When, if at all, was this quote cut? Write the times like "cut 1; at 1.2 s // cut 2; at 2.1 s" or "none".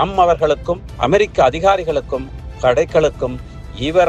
none